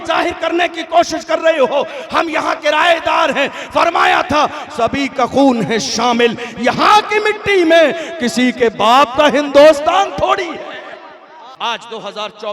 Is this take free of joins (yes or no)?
no